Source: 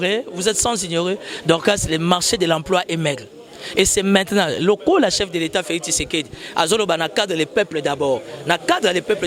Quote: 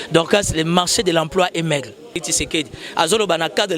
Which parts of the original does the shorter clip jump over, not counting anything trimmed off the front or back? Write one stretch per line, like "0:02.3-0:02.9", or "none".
0:03.6-0:05.8